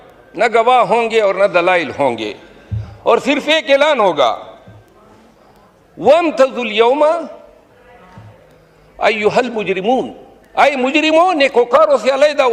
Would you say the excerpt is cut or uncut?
uncut